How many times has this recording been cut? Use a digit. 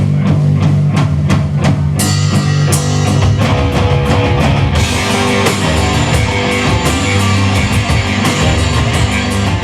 1